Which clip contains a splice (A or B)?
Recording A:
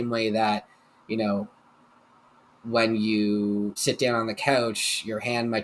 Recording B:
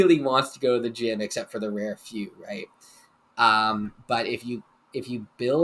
A